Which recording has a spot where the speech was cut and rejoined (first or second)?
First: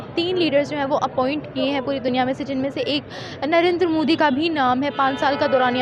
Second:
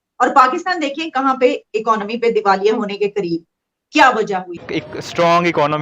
second